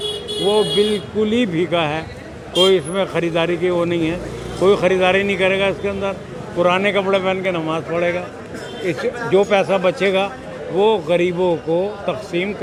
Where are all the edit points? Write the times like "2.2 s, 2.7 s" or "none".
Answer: none